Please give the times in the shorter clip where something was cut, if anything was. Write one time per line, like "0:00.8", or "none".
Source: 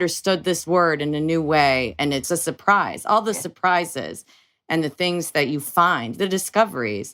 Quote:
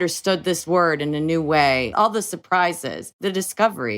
0:01.9
0:03.1